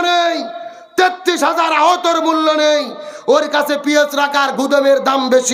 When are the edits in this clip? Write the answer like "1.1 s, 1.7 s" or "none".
none